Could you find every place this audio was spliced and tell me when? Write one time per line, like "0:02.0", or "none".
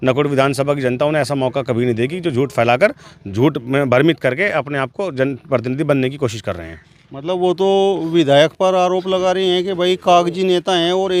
none